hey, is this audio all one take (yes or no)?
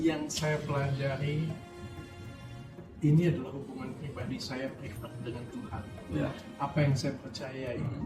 yes